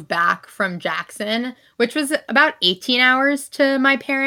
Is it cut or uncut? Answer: uncut